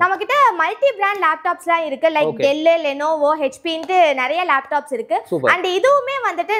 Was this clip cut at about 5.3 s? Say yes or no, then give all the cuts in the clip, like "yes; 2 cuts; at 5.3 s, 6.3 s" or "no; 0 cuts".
no; 0 cuts